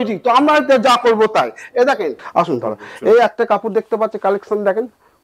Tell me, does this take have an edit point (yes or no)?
yes